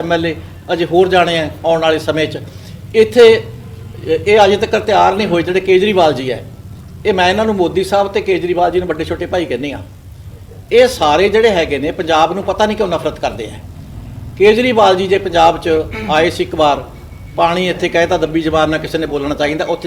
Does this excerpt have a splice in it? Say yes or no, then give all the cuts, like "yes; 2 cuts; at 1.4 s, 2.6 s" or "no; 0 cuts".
no; 0 cuts